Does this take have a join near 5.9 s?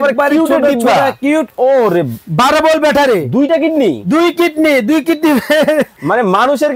no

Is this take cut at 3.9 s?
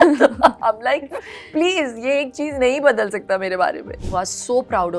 yes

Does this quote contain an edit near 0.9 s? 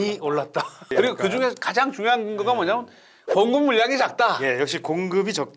yes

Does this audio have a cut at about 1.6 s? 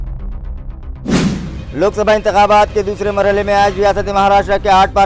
yes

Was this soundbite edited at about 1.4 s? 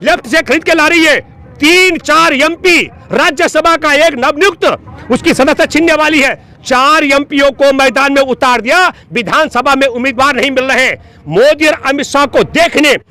no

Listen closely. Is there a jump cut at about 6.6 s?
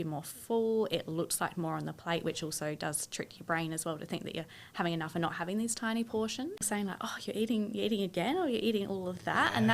yes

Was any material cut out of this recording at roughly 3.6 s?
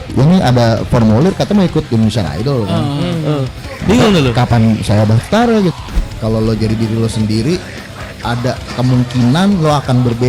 yes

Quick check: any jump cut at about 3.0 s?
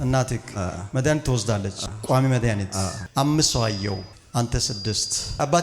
yes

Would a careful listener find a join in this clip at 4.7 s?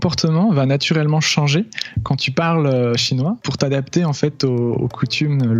no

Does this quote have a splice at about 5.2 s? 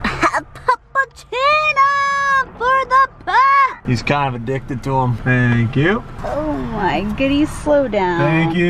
yes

